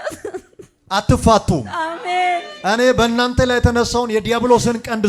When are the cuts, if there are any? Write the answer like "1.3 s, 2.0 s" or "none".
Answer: none